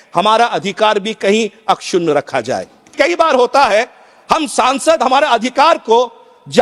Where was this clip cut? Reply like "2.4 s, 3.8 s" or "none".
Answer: 2.9 s